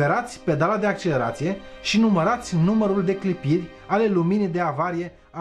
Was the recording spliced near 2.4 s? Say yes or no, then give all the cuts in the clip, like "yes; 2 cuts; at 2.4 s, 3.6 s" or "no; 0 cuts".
no; 0 cuts